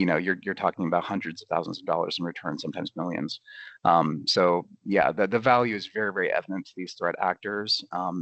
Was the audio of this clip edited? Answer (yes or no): no